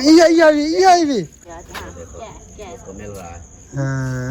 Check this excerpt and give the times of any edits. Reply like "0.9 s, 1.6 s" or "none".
1.4 s